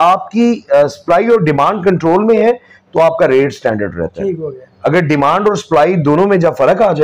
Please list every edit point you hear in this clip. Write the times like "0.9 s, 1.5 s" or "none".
none